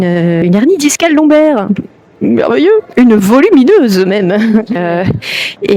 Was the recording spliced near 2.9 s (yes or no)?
no